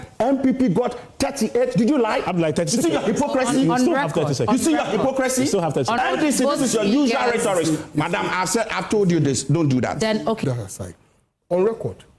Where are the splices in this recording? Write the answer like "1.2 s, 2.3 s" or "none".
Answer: 6.0 s, 10.4 s